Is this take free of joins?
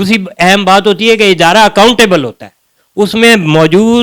yes; 0 cuts

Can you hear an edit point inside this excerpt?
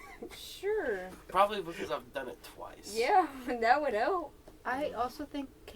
no; 0 cuts

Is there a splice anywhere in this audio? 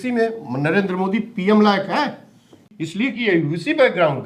yes; 1 cut; at 2.7 s

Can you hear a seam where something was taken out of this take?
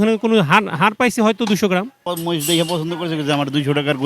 yes; 1 cut; at 2.0 s

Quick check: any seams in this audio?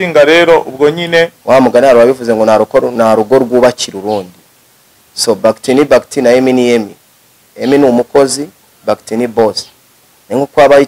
yes; 1 cut; at 1.4 s

